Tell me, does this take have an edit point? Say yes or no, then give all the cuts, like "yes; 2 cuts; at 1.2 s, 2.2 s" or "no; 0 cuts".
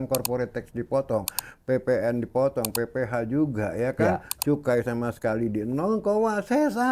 no; 0 cuts